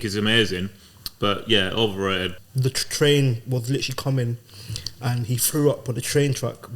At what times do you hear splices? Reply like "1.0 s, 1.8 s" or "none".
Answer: 2.3 s